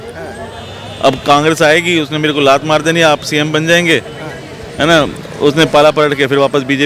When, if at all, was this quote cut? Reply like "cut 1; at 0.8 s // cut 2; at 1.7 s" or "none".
none

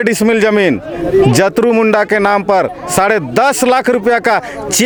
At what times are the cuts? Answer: none

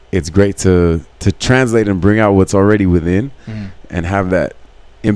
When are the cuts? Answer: cut 1; at 1.1 s

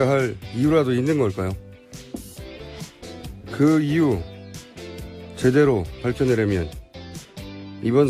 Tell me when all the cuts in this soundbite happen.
none

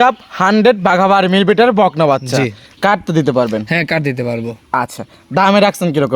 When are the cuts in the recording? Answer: cut 1; at 2.6 s

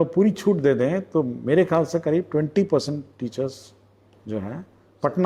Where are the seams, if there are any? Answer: none

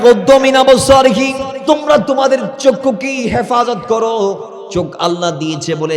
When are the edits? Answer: cut 1; at 1.5 s // cut 2; at 4.5 s

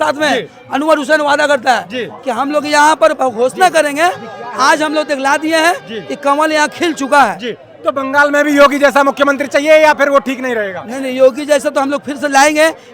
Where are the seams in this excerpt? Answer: none

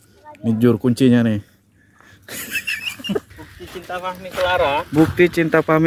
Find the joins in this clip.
cut 1; at 3.3 s

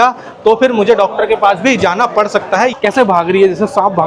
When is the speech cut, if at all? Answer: cut 1; at 2.7 s

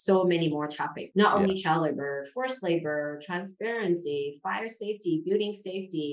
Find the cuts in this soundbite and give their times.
none

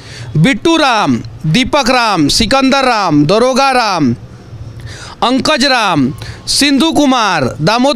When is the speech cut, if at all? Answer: none

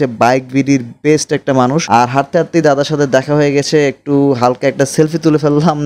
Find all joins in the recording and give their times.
cut 1; at 1.8 s

